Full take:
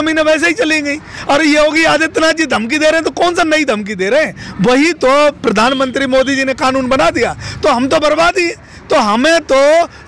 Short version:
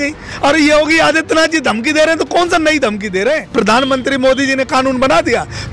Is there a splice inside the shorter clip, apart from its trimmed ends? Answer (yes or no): yes